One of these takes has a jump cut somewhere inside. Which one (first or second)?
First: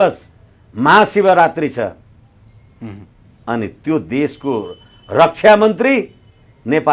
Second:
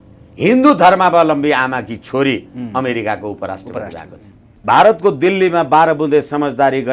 second